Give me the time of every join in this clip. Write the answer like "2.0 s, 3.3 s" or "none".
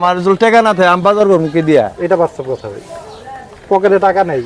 none